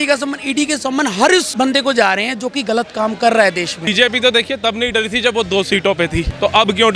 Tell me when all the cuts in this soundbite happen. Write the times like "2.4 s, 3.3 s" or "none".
1.5 s, 3.9 s